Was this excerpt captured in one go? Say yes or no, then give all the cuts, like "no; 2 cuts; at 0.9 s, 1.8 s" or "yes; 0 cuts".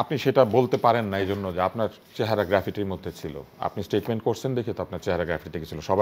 yes; 0 cuts